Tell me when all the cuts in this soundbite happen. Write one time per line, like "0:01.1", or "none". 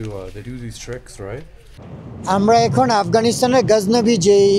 0:01.8